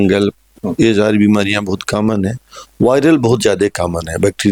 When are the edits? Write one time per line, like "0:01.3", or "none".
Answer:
none